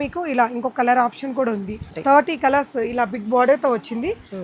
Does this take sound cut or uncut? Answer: cut